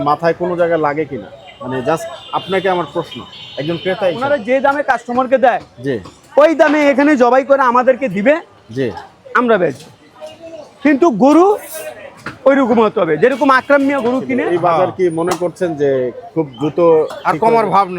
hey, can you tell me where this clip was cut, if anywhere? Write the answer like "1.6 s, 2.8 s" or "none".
4.2 s, 14.3 s